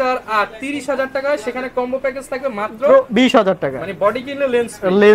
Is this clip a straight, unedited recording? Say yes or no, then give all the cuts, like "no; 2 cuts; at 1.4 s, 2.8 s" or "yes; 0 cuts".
yes; 0 cuts